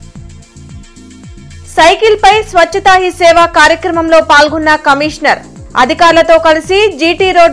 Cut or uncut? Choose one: uncut